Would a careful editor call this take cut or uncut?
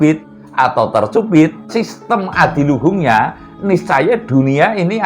cut